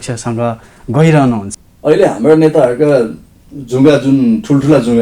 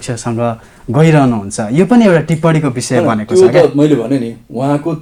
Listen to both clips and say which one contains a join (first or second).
first